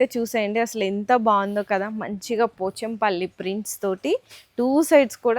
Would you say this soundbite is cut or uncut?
uncut